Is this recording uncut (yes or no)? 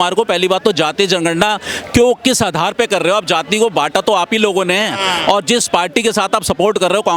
yes